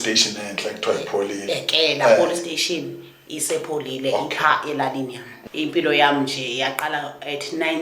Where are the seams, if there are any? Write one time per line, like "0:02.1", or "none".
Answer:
0:05.3